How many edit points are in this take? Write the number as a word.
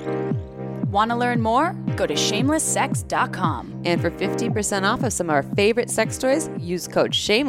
one